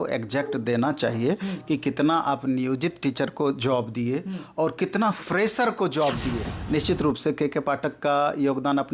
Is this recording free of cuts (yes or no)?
no